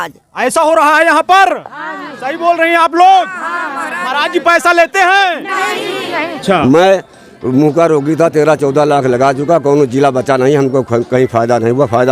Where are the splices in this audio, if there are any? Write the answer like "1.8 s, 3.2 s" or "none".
6.3 s